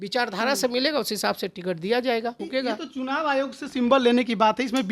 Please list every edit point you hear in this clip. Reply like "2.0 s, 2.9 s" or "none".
2.4 s

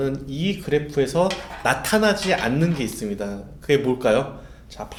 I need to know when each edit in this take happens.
none

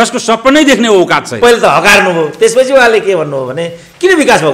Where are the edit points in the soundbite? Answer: 1.4 s

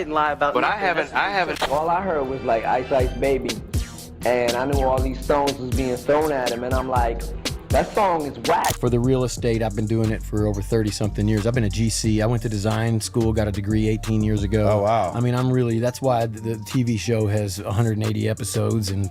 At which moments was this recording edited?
1.5 s, 9.0 s

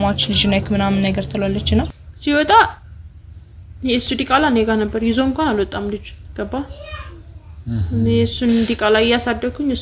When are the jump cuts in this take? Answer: 2.0 s

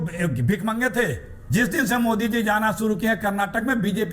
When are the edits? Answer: 1.3 s

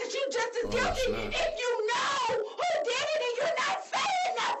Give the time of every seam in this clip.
none

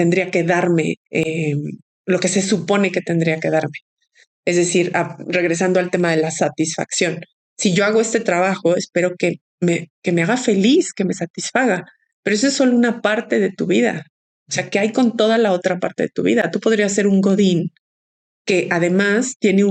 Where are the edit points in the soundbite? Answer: none

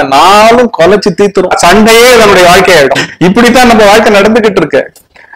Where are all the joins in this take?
1.5 s, 3.0 s

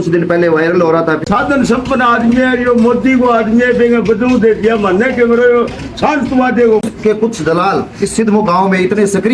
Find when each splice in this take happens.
1.2 s, 6.8 s

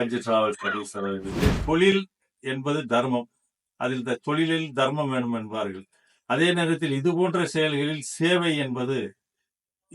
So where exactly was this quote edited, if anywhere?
1.4 s

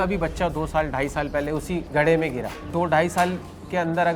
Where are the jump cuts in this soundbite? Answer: 1.9 s, 2.6 s

